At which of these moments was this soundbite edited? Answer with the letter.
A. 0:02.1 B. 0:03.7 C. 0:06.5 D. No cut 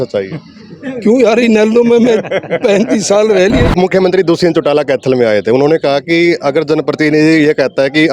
B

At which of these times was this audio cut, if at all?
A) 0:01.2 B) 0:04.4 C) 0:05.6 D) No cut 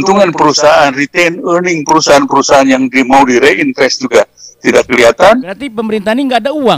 C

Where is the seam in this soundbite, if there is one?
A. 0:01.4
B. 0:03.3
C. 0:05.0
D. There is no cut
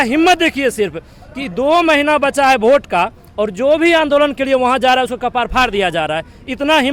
D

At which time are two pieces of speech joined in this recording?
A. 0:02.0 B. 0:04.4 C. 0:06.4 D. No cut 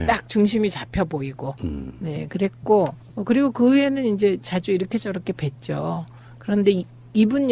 D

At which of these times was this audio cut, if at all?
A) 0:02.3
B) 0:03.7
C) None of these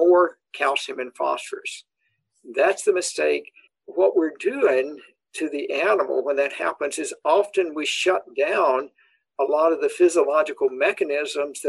B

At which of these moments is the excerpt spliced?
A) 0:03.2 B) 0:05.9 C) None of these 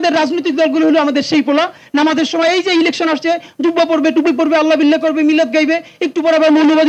C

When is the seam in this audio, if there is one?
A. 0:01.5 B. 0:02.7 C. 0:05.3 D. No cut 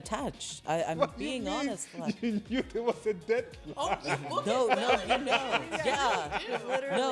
D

